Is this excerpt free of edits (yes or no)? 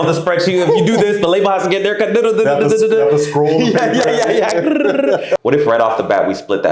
no